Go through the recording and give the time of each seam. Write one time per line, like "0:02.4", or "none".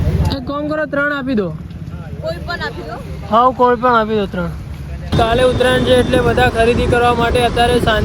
0:05.1